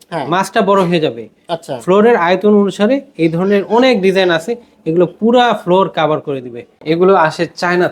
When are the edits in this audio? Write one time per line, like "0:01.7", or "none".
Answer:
0:06.7